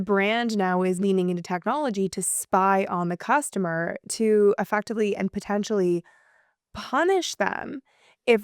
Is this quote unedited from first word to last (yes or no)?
no